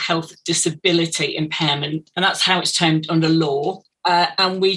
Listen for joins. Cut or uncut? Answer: cut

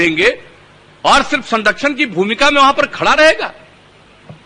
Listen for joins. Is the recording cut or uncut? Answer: uncut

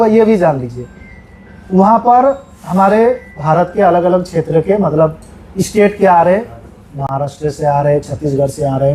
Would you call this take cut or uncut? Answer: uncut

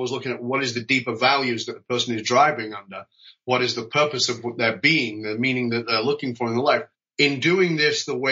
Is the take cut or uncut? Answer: cut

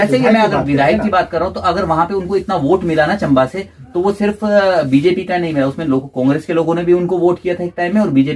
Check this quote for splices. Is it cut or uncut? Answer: uncut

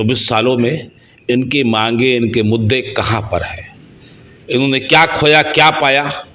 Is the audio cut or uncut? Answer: uncut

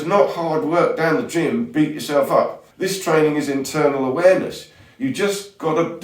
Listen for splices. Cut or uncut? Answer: cut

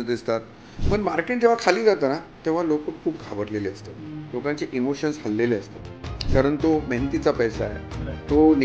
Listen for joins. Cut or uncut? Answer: uncut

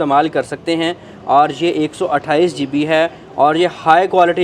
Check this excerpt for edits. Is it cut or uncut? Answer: uncut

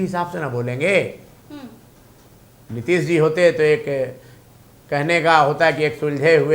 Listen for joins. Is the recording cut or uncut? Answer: uncut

